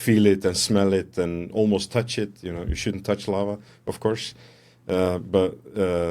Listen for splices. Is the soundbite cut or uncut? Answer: uncut